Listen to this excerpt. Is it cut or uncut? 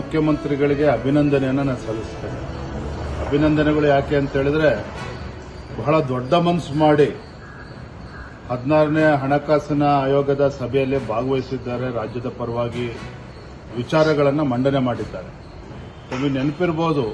uncut